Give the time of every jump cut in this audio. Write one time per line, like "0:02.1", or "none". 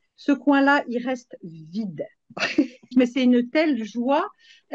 0:02.9